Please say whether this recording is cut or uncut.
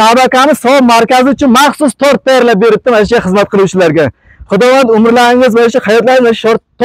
uncut